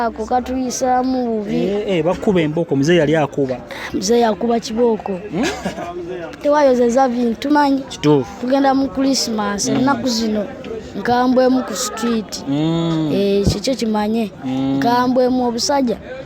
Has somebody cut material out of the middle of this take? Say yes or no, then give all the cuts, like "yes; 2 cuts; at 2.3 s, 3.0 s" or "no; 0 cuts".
yes; 1 cut; at 7.5 s